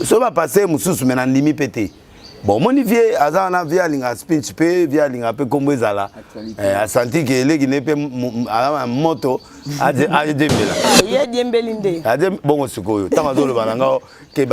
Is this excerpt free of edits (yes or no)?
no